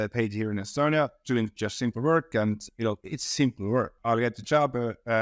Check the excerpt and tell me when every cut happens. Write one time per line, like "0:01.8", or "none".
0:03.9